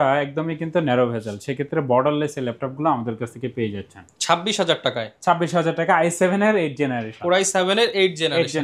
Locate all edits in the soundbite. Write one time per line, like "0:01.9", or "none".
none